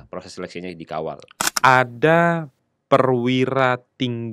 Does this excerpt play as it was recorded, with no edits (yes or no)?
no